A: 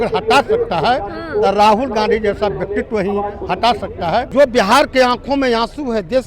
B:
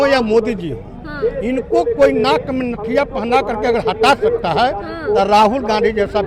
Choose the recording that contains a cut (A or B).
A